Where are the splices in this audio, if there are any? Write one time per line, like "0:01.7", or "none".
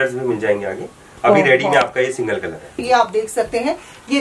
0:02.7

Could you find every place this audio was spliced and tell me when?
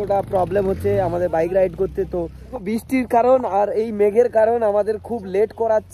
0:02.6

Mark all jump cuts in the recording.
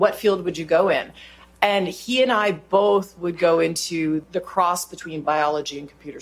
0:04.3

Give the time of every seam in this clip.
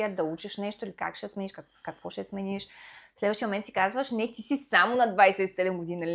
none

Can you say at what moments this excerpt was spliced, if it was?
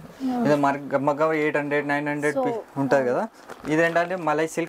none

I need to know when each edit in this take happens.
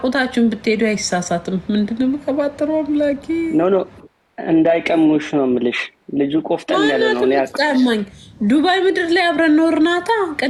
none

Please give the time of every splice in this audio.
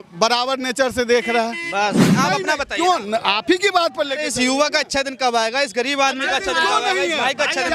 0:02.1

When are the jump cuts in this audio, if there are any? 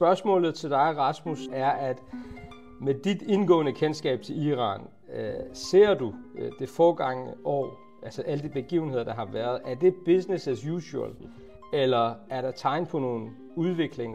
none

